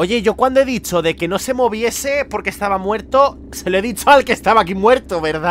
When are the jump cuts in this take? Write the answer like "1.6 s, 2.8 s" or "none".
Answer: none